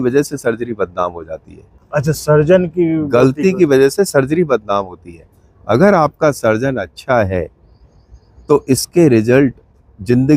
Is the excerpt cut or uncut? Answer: uncut